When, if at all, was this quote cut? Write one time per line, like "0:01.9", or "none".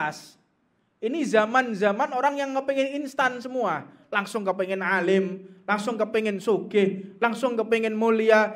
none